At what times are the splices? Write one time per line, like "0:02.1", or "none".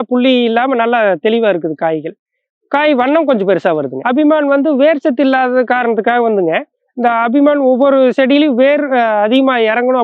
0:04.0